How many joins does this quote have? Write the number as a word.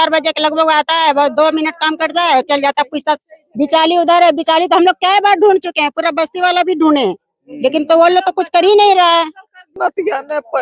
one